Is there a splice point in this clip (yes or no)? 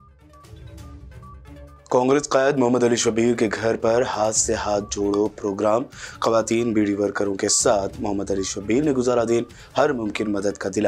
no